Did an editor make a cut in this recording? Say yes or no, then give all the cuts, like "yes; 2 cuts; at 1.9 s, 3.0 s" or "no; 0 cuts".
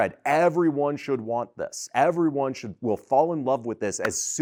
no; 0 cuts